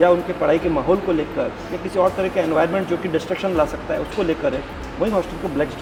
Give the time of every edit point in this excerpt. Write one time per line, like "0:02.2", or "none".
none